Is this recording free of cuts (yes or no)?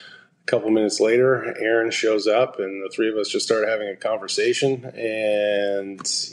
yes